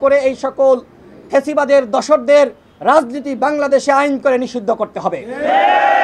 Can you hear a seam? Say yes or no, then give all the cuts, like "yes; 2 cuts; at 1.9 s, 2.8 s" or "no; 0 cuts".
no; 0 cuts